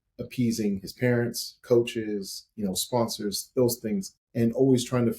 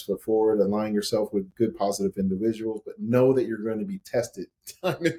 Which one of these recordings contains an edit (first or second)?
first